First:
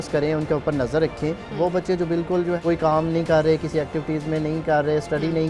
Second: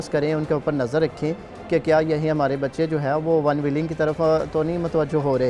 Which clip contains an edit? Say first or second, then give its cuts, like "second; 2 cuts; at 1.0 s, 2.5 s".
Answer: first; 2 cuts; at 1.5 s, 2.6 s